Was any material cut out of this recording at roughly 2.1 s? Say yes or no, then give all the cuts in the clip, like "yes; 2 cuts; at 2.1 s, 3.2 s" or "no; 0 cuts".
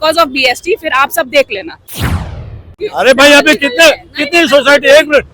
yes; 1 cut; at 2.1 s